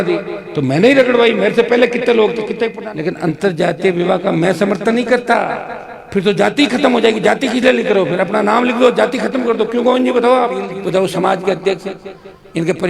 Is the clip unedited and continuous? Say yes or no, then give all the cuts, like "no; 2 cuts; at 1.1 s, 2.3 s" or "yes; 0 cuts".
no; 2 cuts; at 2.8 s, 10.8 s